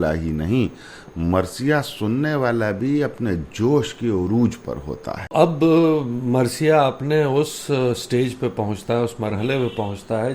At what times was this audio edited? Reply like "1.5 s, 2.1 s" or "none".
5.2 s